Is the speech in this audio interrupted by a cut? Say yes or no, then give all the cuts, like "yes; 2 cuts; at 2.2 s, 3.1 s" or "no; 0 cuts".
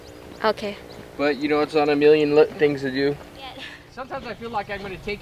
yes; 1 cut; at 3.8 s